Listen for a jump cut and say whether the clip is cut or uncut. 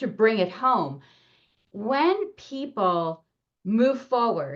uncut